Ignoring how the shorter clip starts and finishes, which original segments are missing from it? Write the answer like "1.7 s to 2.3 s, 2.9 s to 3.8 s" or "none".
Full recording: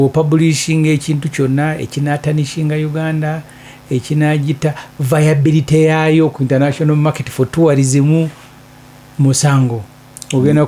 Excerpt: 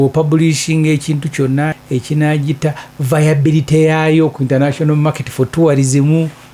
1.8 s to 3.8 s